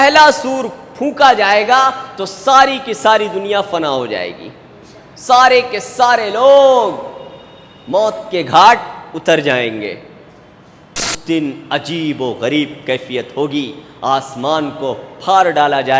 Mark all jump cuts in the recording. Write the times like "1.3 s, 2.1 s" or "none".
11.2 s